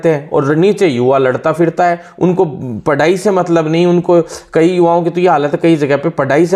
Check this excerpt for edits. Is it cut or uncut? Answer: uncut